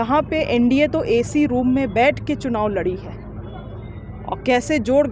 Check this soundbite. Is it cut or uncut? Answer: uncut